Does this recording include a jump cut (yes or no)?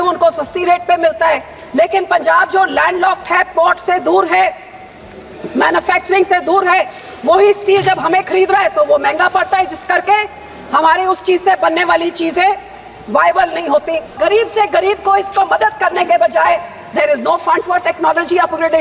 yes